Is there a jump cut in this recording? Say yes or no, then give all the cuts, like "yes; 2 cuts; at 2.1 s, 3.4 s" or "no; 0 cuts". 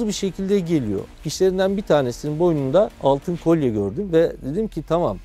yes; 2 cuts; at 1.1 s, 2.9 s